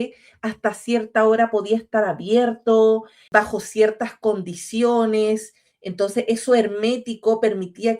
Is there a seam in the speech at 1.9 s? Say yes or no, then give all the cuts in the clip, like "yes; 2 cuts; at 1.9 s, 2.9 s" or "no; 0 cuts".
no; 1 cut; at 3.1 s